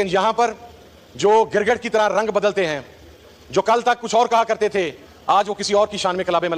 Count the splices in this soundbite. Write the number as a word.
zero